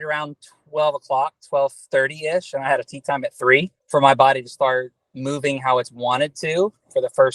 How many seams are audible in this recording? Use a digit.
1